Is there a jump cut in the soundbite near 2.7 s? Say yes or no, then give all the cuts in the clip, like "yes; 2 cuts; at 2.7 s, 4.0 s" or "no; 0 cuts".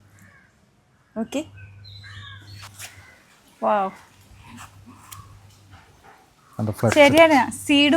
yes; 1 cut; at 2.7 s